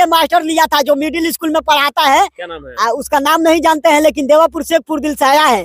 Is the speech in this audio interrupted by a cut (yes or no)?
no